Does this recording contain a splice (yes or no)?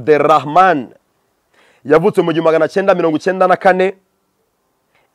no